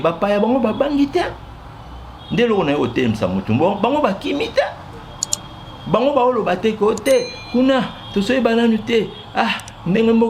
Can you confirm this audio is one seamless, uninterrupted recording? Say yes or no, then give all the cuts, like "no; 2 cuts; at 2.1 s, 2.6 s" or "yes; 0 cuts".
yes; 0 cuts